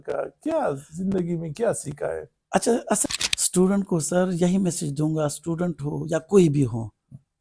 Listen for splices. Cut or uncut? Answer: cut